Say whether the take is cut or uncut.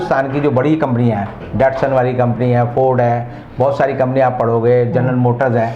uncut